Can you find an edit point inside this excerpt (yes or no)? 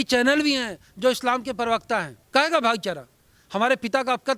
yes